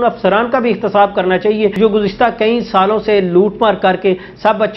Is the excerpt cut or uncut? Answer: cut